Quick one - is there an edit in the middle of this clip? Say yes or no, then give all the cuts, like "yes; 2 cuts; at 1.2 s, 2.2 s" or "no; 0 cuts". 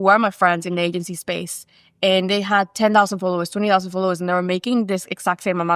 no; 0 cuts